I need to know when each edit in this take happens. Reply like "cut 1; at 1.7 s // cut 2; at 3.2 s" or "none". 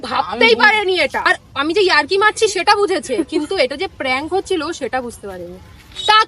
cut 1; at 1.2 s